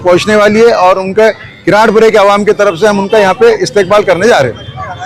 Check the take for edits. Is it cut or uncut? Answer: uncut